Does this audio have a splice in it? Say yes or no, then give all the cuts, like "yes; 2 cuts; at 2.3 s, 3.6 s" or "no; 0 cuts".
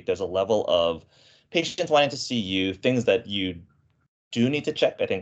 no; 0 cuts